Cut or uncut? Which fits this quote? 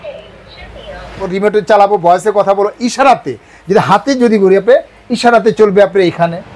cut